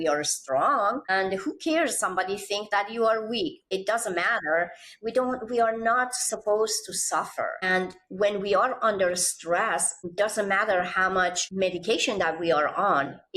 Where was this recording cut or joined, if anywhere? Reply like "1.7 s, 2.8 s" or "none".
1.1 s, 3.7 s, 7.6 s, 10.0 s, 11.4 s